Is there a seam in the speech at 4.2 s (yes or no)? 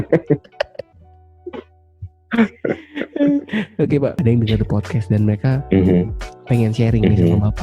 yes